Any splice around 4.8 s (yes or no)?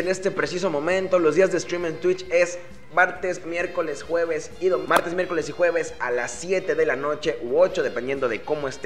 yes